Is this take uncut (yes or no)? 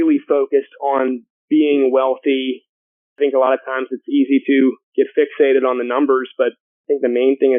no